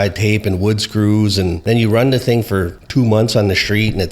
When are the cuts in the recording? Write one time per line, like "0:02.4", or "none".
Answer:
0:01.6
0:02.8